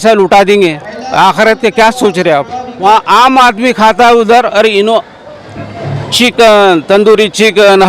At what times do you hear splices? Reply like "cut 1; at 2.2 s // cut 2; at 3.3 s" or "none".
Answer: cut 1; at 2.8 s